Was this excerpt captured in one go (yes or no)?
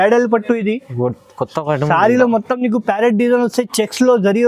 yes